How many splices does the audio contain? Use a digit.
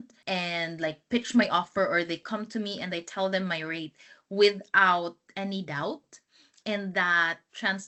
0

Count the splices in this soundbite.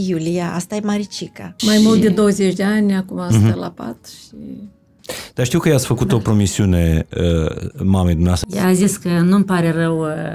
2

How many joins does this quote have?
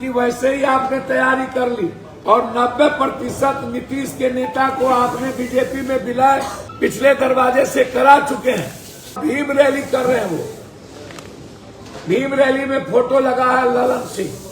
3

